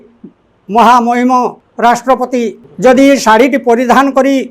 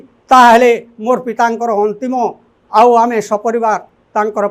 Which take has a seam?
first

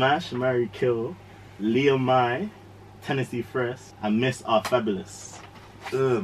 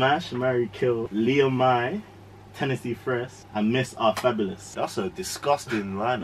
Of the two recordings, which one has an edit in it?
second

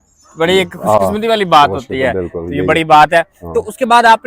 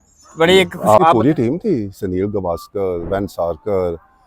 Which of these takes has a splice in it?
second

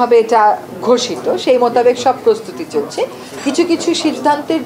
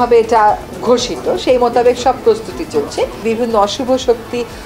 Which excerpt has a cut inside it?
second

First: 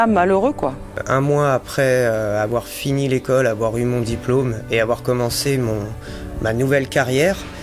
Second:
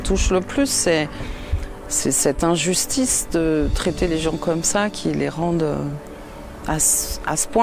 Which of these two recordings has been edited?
first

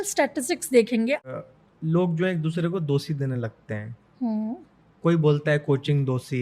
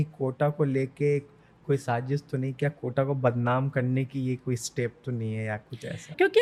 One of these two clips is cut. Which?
first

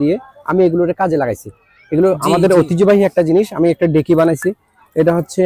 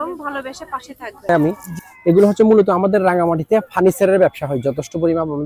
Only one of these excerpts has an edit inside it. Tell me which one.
second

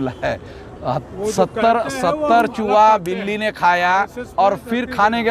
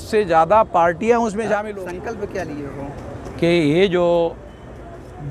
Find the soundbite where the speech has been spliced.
second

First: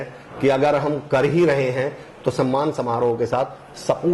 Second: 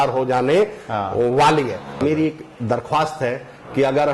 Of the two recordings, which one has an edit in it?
second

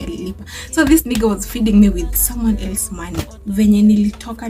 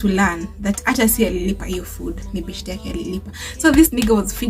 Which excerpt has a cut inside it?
first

